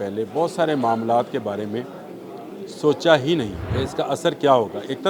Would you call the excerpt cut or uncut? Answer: cut